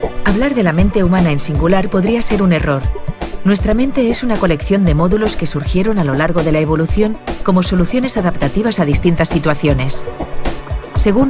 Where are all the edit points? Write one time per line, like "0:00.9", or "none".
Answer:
0:09.1